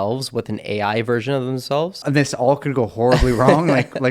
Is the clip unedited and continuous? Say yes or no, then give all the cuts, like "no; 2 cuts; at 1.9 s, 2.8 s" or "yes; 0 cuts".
no; 1 cut; at 2.0 s